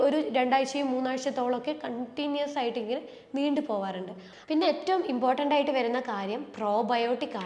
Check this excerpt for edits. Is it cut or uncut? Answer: cut